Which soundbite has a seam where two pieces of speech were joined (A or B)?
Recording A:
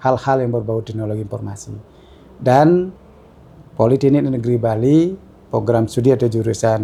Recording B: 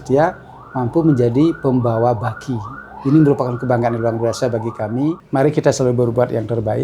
B